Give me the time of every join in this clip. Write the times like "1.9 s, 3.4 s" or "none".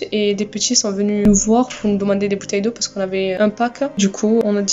1.2 s, 3.4 s